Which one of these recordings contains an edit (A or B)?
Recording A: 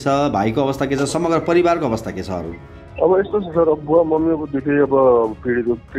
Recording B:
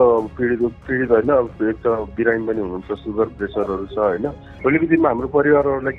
B